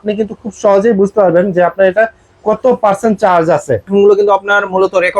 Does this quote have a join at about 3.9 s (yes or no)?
yes